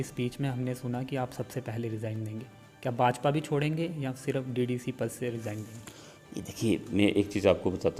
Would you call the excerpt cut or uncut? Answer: uncut